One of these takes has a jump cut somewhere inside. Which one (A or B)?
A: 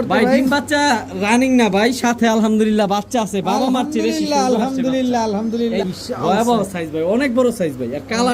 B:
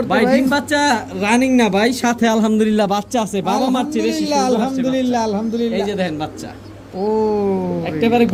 A